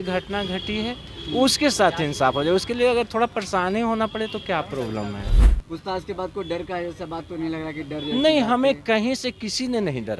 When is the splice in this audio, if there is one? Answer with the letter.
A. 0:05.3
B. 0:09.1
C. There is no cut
A